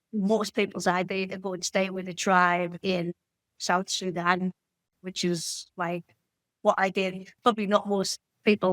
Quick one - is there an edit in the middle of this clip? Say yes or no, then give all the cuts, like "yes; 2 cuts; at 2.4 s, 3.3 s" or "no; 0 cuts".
yes; 2 cuts; at 4.8 s, 7.4 s